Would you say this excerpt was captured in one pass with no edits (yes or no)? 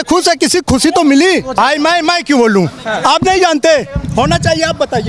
no